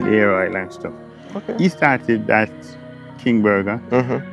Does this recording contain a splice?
no; 0 cuts

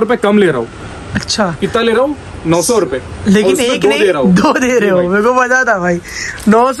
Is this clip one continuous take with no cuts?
yes; 0 cuts

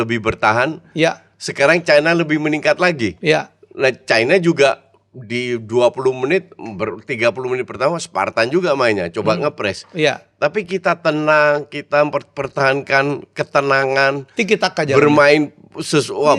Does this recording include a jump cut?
no; 0 cuts

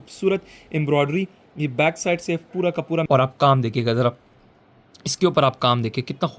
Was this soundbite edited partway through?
yes; 1 cut; at 3.1 s

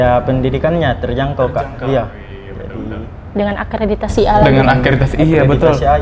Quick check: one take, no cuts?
yes; 0 cuts

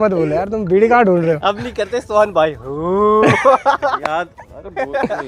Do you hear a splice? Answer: no; 0 cuts

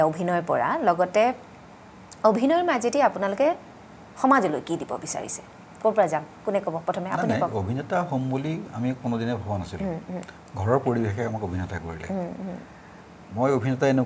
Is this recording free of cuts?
yes; 0 cuts

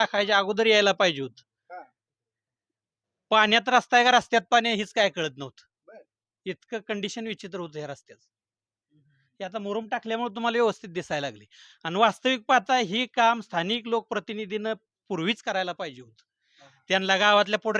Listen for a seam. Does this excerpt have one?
no; 0 cuts

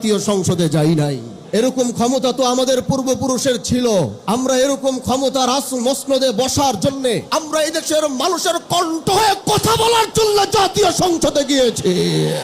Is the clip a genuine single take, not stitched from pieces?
no; 3 cuts; at 1.3 s, 4.2 s, 7.3 s

